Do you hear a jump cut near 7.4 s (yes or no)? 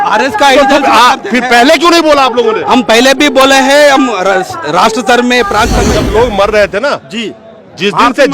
no